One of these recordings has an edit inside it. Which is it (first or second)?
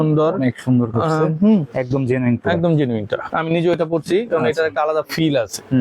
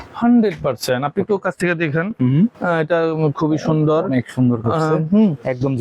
first